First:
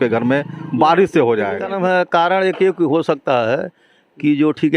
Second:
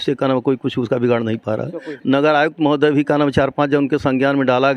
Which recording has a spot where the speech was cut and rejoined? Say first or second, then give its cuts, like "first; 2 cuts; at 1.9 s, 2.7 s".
first; 1 cut; at 1.7 s